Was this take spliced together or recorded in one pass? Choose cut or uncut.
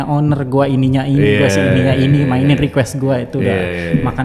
uncut